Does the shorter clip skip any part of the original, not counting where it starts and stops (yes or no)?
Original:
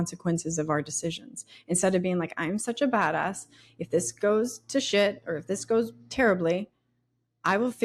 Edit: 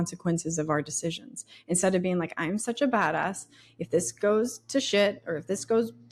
no